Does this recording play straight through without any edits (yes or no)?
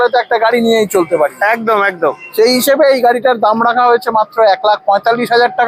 yes